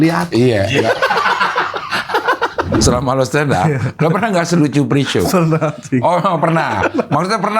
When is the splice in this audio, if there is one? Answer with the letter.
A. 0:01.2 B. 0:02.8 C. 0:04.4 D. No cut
B